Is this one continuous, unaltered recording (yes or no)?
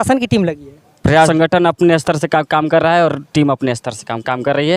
no